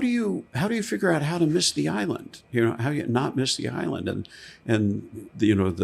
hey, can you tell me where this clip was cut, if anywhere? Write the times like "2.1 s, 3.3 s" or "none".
none